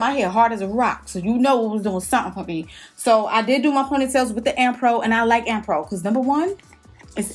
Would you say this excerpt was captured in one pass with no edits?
yes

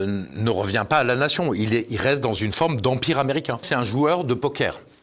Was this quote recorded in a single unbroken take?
no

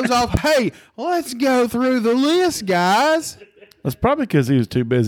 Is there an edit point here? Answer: no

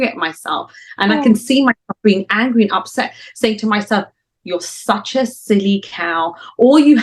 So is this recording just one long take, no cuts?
yes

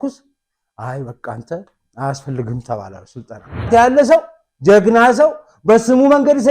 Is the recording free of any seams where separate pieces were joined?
no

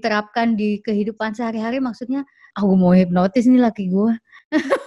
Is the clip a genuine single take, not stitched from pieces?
no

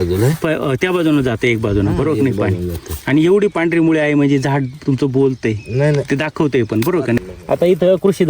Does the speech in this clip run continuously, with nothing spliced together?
no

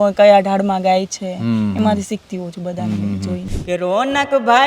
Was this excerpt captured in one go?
no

